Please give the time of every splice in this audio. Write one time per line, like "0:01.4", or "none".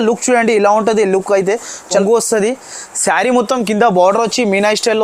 0:02.0